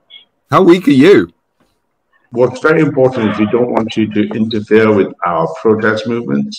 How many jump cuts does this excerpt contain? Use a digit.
1